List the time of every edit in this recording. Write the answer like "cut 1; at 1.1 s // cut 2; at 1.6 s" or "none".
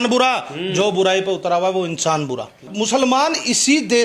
cut 1; at 2.7 s